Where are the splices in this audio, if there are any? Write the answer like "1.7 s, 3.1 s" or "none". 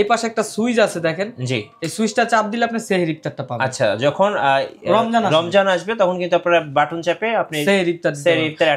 none